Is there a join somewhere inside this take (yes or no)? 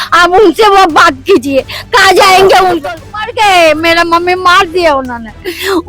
yes